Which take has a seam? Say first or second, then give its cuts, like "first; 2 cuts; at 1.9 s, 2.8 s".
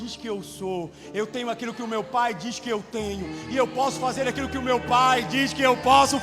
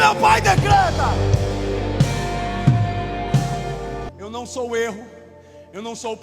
second; 1 cut; at 4.1 s